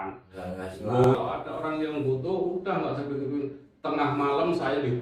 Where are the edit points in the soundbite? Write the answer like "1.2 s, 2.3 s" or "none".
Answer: 1.1 s

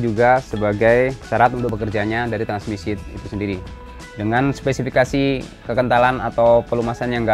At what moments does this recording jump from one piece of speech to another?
1.7 s, 3.7 s

